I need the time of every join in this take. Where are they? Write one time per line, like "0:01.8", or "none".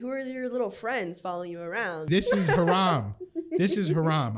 0:02.1

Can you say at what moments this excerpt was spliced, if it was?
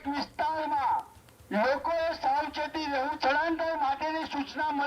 0:03.1

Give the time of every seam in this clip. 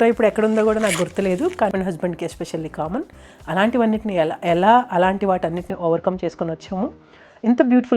0:01.7

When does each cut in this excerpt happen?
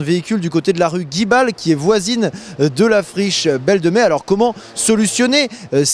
none

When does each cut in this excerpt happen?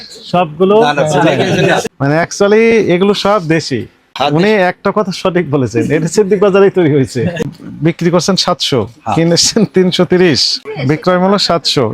0:01.9
0:04.0
0:07.5
0:10.7

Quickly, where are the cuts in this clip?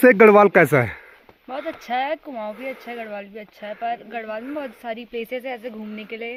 none

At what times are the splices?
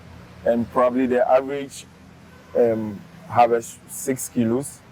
none

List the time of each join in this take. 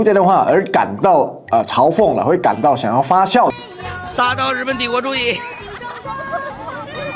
0:03.6

